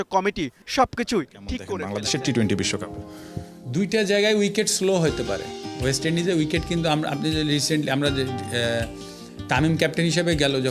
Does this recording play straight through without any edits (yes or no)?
no